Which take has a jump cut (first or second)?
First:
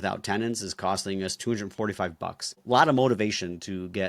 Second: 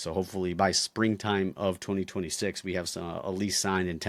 first